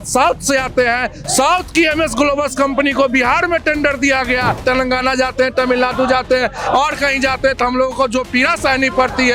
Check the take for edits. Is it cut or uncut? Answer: cut